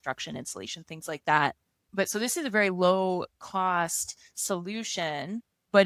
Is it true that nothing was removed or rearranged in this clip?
yes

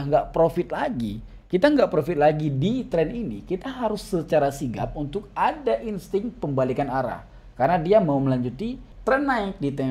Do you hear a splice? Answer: yes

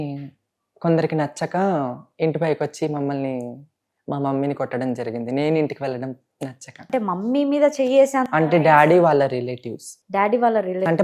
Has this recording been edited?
yes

